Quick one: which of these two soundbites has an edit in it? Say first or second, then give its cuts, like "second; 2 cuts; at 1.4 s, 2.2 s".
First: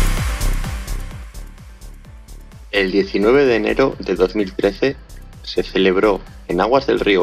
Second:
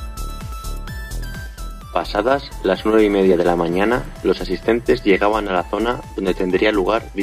first; 1 cut; at 1.2 s